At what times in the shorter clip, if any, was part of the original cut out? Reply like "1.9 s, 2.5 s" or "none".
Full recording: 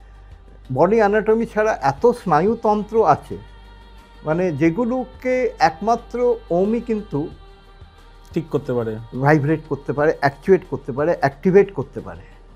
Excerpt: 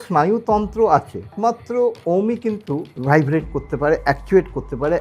1.3 s, 2.9 s